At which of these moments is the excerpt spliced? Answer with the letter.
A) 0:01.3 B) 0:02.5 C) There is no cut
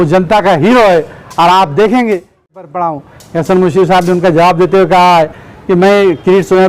B